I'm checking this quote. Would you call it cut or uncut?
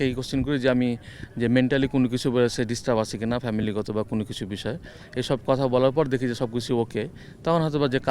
uncut